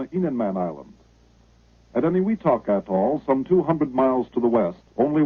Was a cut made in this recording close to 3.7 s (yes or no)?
yes